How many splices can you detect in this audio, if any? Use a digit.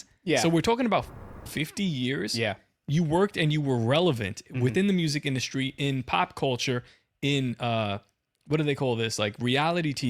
0